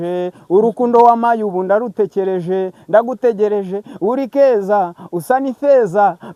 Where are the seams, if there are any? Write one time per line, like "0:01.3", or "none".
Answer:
none